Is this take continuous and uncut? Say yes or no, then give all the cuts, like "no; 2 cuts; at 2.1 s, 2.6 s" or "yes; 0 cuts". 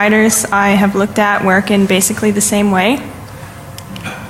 no; 1 cut; at 1.1 s